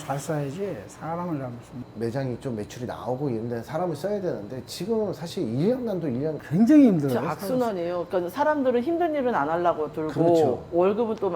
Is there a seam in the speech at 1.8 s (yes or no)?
yes